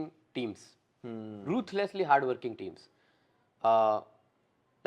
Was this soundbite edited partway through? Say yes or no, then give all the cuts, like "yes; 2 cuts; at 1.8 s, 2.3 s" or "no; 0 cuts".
no; 0 cuts